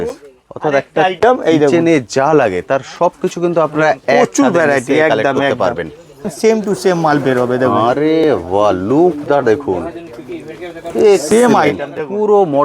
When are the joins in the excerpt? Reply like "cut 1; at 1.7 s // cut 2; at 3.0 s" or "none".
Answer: cut 1; at 6.3 s